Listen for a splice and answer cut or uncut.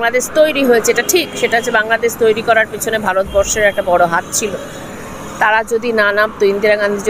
uncut